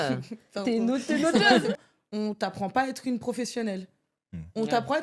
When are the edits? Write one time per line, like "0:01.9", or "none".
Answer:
0:01.8